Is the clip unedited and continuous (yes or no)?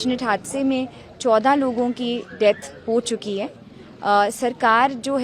yes